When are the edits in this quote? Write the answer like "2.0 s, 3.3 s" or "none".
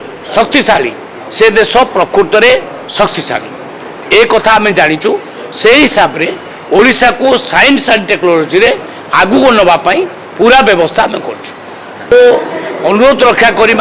12.1 s

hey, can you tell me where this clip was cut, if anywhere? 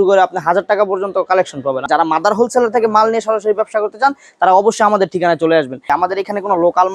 1.8 s, 5.9 s

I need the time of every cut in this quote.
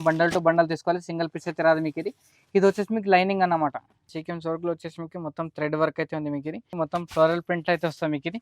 4.1 s, 6.7 s

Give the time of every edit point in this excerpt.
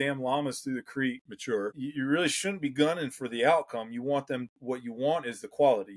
1.2 s

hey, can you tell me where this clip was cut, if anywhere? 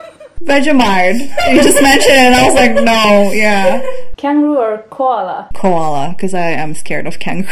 4.0 s

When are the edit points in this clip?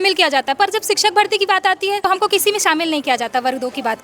2.0 s

